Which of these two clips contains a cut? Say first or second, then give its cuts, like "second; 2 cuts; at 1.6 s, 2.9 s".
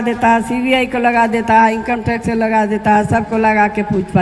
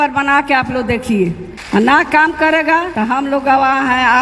second; 2 cuts; at 1.5 s, 2.9 s